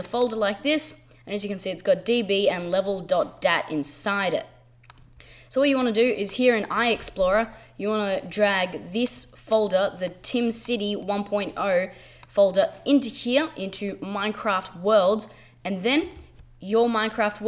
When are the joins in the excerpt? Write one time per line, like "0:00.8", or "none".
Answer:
none